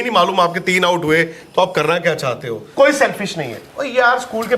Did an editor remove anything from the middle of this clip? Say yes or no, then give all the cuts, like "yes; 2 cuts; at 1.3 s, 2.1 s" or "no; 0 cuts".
yes; 1 cut; at 2.6 s